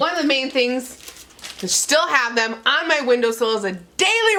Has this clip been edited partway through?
no; 0 cuts

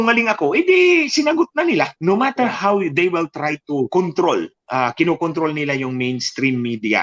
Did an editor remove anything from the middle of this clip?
yes; 1 cut; at 1.9 s

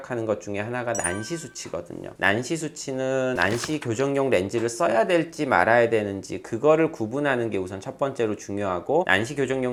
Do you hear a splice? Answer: no; 0 cuts

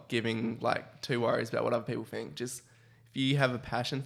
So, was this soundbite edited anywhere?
no; 0 cuts

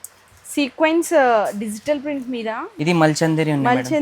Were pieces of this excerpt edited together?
yes; 1 cut; at 2.7 s

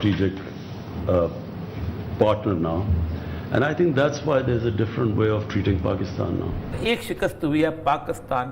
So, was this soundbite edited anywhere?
yes; 1 cut; at 6.8 s

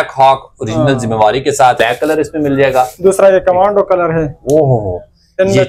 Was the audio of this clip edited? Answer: yes; 1 cut; at 1.8 s

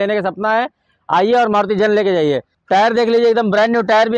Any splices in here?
yes; 1 cut; at 2.5 s

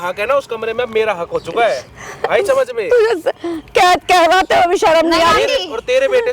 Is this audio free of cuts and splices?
yes; 0 cuts

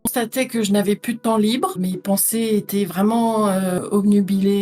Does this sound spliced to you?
yes; 1 cut; at 1.7 s

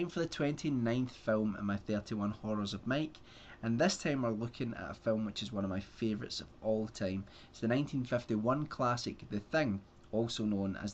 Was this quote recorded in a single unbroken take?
yes; 0 cuts

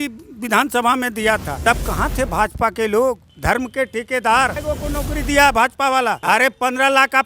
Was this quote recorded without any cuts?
no; 4 cuts; at 1.5 s, 3.3 s, 4.6 s, 6.2 s

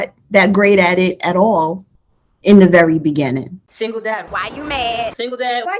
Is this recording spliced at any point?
yes; 1 cut; at 3.5 s

